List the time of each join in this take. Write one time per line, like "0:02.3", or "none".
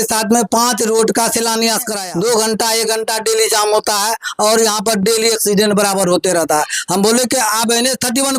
0:02.0